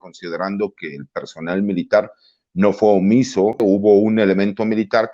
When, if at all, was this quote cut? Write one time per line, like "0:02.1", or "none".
0:03.6